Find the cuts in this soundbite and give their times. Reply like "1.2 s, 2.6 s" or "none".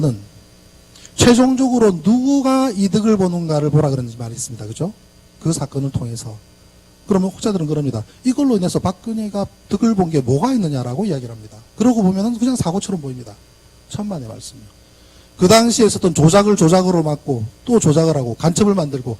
9.1 s